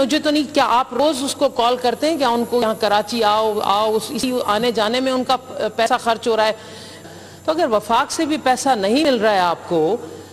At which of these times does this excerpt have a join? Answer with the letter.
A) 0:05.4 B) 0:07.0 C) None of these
B